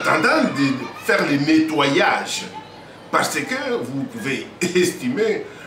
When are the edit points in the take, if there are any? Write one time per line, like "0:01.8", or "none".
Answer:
none